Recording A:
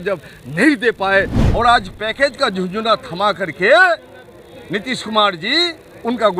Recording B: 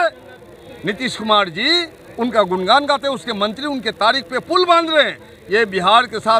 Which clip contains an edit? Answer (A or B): A